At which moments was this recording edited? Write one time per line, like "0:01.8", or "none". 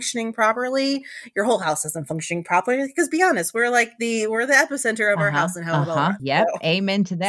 0:06.2